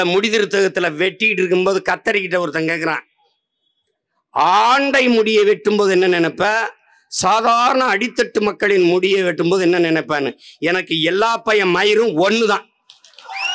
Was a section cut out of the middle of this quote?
no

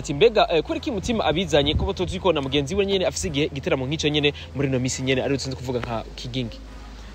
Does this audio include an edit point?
no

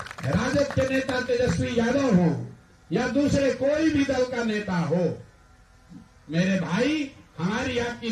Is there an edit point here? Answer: no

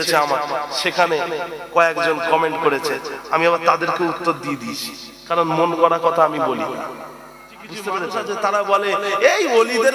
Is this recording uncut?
no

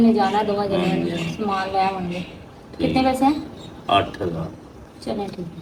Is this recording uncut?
yes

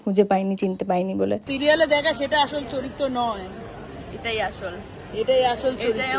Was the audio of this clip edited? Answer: yes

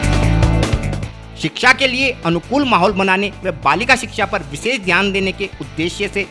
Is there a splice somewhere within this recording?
no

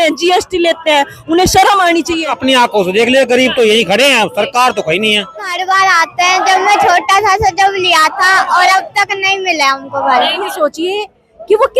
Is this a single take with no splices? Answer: no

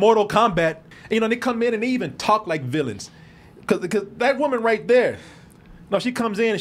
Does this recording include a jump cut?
yes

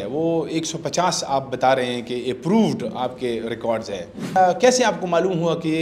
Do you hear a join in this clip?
yes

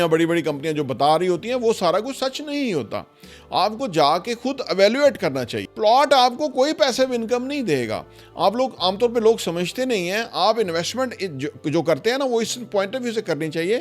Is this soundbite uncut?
no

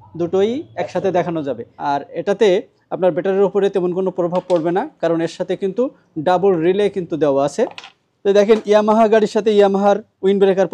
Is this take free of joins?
no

